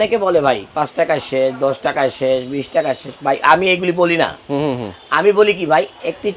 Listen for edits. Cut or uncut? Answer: uncut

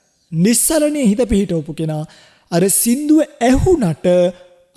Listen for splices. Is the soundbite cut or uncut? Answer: uncut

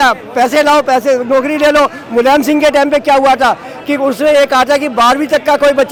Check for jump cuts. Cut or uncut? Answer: uncut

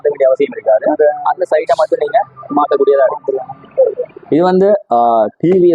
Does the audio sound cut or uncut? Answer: cut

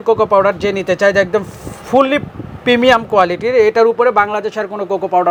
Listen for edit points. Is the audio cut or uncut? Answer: uncut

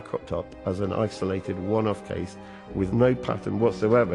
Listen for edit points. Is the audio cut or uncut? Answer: uncut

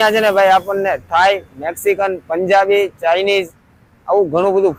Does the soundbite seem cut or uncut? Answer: uncut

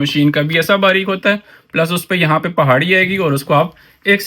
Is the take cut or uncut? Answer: uncut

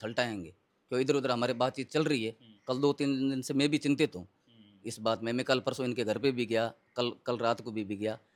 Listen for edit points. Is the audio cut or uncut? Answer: uncut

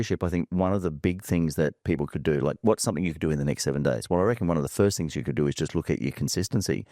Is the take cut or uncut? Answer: uncut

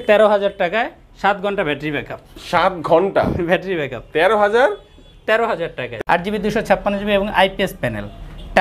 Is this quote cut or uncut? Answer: cut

